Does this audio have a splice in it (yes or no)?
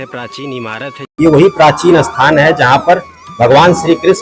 yes